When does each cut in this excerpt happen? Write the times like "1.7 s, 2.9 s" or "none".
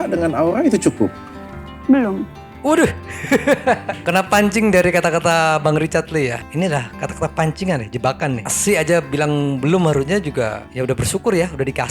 none